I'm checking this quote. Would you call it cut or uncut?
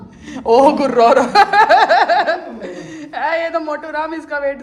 uncut